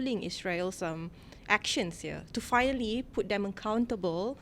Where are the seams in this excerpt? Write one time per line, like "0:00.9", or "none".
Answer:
none